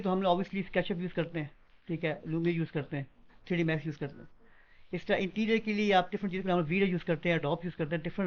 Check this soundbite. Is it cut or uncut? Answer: uncut